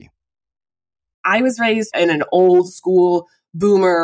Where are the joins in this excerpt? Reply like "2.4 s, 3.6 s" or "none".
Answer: 1.2 s, 1.9 s